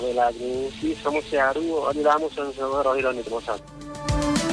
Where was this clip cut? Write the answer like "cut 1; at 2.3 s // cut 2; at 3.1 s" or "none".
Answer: cut 1; at 0.8 s // cut 2; at 3.6 s